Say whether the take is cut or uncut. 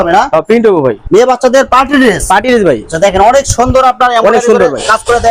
cut